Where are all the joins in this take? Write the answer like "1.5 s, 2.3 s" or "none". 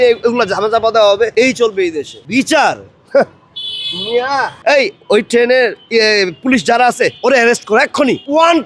4.5 s